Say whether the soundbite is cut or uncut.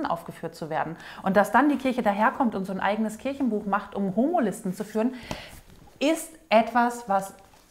uncut